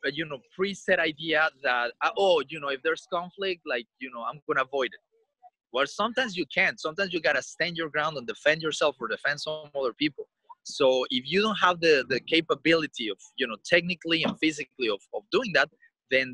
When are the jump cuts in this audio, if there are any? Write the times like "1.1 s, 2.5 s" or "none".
none